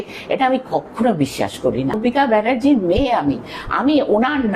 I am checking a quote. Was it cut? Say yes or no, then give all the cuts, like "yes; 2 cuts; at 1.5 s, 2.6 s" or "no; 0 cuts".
yes; 1 cut; at 2.0 s